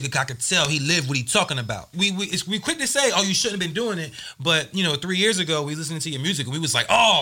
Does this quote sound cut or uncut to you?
cut